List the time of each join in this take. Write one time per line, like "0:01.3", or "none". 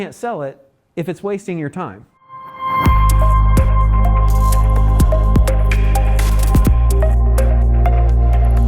0:02.5